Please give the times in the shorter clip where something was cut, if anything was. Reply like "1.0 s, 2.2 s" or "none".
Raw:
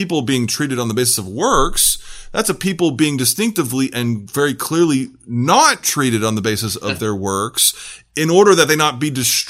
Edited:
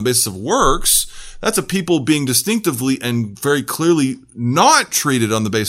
none

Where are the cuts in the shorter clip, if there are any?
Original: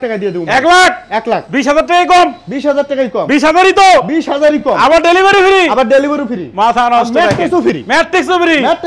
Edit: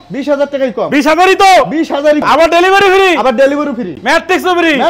2.2 s, 4.0 s

